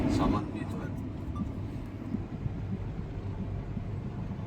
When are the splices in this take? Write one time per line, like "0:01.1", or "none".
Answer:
0:02.1